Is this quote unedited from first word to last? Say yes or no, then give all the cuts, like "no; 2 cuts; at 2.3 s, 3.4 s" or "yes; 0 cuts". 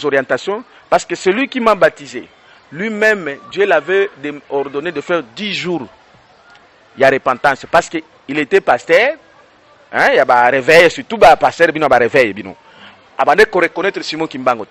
yes; 0 cuts